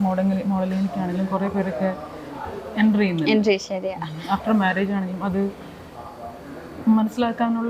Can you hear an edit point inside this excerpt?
no; 0 cuts

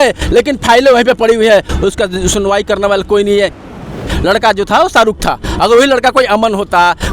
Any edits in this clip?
yes; 1 cut; at 3.9 s

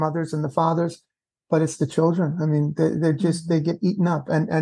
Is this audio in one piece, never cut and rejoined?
yes; 0 cuts

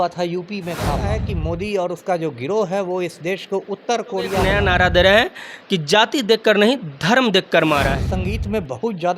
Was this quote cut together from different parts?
yes; 3 cuts; at 1.1 s, 4.4 s, 8.1 s

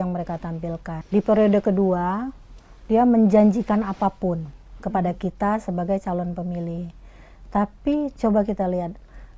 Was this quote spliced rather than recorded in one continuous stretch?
yes; 1 cut; at 0.9 s

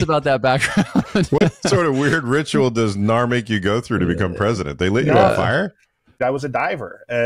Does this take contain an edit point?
yes; 1 cut; at 6.1 s

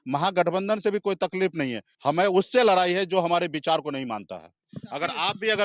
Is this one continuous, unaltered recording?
no; 1 cut; at 1.8 s

